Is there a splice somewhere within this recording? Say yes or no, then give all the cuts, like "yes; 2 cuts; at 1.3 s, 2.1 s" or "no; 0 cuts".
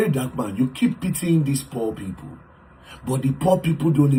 no; 0 cuts